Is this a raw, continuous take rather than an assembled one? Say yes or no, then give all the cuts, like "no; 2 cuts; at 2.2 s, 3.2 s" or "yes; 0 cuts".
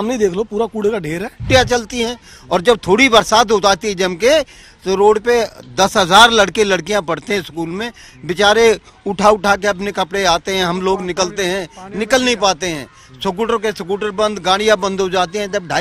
no; 1 cut; at 1.4 s